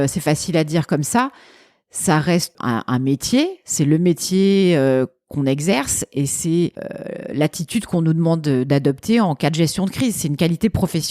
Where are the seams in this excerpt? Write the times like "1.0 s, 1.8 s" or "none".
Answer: 2.6 s